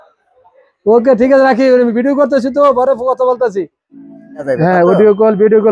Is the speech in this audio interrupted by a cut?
yes; 1 cut; at 4.6 s

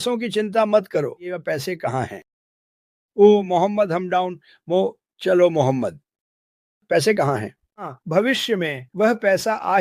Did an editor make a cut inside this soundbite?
yes; 2 cuts; at 1.3 s, 8.0 s

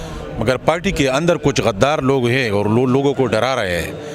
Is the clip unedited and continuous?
yes; 0 cuts

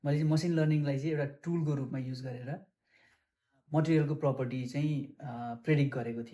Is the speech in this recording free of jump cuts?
yes; 0 cuts

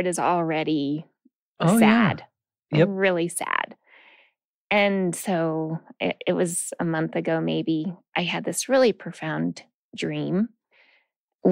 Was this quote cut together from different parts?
no; 0 cuts

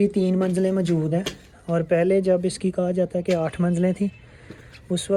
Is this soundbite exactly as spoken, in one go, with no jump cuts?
yes; 0 cuts

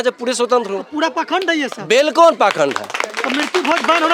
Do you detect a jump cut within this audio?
no; 0 cuts

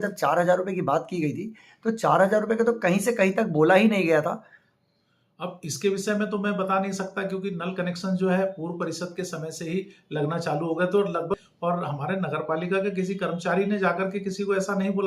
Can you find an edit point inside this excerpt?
yes; 1 cut; at 11.4 s

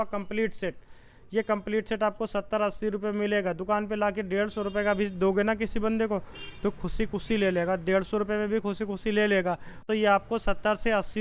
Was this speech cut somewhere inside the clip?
yes; 1 cut; at 9.9 s

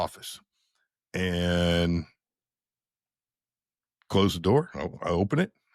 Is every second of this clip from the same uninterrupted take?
yes; 0 cuts

